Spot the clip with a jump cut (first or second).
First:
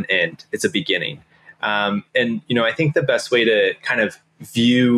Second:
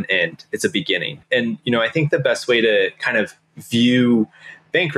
second